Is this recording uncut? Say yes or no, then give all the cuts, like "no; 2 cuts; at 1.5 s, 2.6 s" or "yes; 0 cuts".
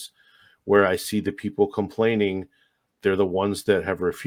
yes; 0 cuts